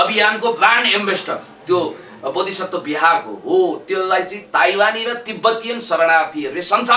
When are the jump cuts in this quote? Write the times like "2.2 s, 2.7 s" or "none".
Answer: none